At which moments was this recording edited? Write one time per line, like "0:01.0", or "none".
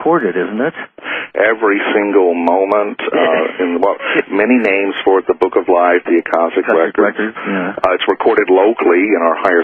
0:07.8